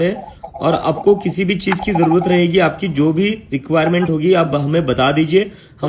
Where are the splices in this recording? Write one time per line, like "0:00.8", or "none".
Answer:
none